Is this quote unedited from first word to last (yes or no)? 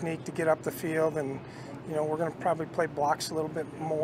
yes